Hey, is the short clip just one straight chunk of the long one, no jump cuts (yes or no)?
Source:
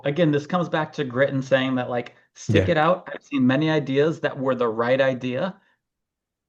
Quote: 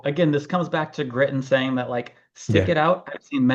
yes